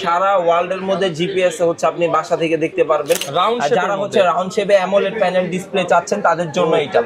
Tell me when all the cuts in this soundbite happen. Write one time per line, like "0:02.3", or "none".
0:03.2